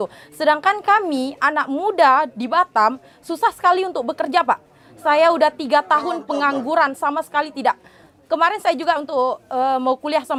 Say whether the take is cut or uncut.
uncut